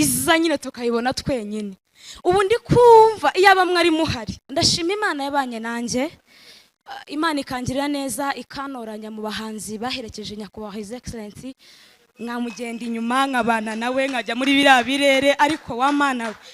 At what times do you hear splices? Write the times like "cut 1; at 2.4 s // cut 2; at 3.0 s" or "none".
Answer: cut 1; at 4.5 s